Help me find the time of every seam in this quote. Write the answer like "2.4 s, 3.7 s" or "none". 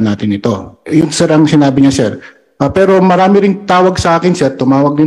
none